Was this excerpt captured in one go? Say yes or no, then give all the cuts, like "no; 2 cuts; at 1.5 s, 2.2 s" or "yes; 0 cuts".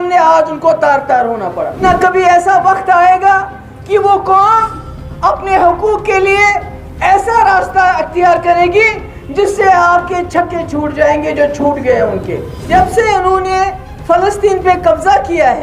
no; 2 cuts; at 1.8 s, 12.5 s